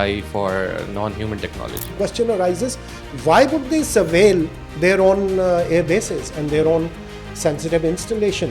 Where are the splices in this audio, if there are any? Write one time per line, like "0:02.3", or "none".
0:01.9
0:04.6